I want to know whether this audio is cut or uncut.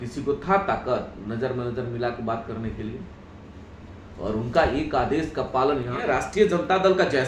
cut